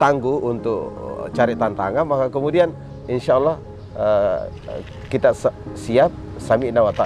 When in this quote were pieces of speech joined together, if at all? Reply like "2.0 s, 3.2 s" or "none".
2.9 s